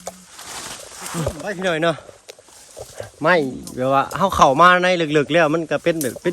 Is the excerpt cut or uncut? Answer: cut